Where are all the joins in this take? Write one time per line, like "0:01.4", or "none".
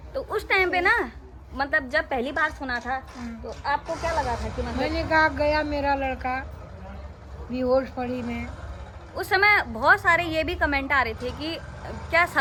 none